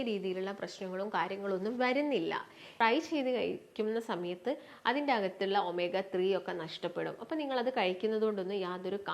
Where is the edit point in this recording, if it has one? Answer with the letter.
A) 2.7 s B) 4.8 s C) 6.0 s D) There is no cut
A